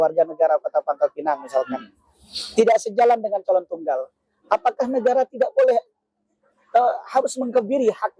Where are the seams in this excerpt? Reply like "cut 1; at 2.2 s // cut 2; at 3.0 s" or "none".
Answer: none